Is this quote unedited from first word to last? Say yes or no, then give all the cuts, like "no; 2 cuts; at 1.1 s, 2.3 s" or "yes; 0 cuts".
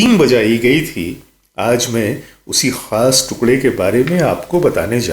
yes; 0 cuts